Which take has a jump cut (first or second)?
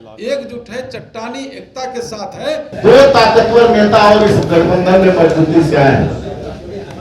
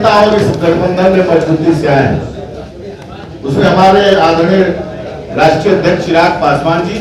first